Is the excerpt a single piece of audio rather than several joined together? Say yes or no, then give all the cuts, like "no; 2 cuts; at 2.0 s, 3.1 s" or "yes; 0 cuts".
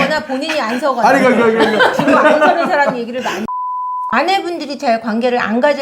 no; 1 cut; at 4.1 s